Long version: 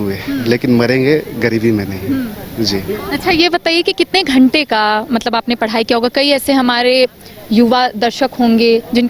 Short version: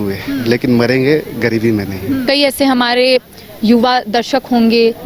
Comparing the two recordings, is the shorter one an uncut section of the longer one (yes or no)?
no